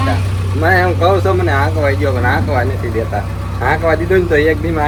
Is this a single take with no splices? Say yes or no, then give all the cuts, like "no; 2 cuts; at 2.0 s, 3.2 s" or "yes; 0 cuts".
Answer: yes; 0 cuts